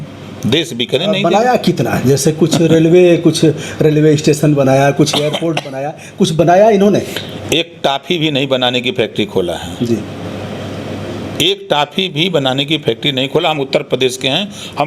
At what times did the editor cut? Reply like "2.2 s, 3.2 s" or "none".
none